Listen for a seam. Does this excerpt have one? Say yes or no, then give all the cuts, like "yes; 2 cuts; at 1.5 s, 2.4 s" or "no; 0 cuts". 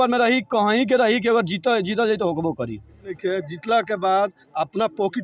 yes; 1 cut; at 3.2 s